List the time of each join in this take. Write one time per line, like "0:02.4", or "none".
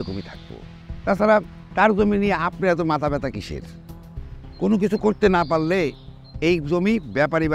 none

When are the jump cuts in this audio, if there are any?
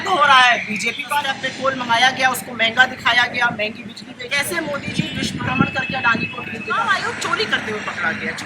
0:01.4
0:04.3
0:06.7

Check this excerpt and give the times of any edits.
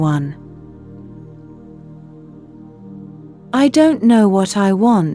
none

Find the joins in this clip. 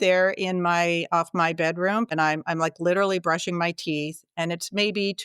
0:02.1

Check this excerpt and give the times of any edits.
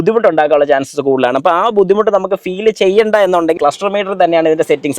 0:03.6

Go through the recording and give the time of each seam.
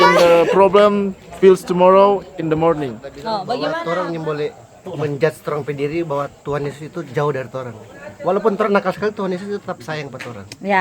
0:03.8

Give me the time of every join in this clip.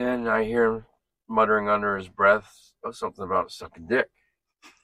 none

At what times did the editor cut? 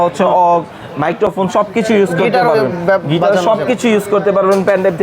none

